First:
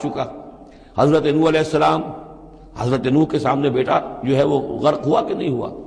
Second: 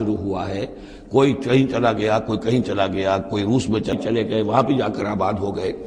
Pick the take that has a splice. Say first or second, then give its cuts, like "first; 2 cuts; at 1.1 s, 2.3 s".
second; 1 cut; at 3.9 s